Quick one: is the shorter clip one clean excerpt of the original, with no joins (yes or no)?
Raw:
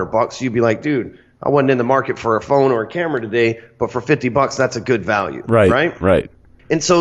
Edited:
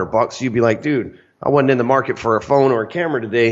yes